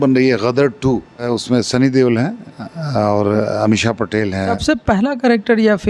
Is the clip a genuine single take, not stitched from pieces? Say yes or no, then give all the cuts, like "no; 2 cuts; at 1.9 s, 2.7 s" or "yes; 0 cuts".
no; 2 cuts; at 1.2 s, 4.6 s